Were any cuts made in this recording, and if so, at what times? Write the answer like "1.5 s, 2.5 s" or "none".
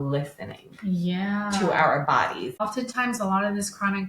2.6 s